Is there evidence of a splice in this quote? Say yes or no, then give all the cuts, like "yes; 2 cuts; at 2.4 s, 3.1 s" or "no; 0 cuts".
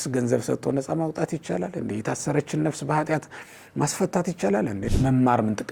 yes; 1 cut; at 4.8 s